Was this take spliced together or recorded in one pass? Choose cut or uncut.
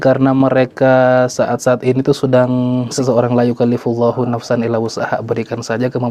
cut